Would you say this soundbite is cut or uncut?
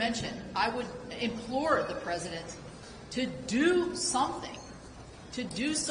cut